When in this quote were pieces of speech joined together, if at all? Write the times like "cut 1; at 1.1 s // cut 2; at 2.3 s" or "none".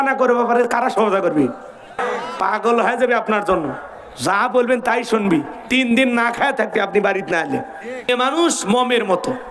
cut 1; at 2.0 s // cut 2; at 8.1 s